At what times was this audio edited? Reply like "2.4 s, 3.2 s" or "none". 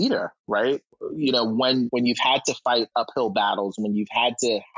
1.9 s